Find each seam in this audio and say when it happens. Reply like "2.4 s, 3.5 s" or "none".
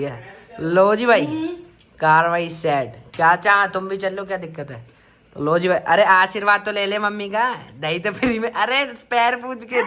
none